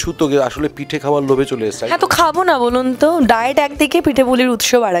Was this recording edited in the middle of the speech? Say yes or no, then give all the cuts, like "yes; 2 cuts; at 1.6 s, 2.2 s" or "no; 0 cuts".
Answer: no; 0 cuts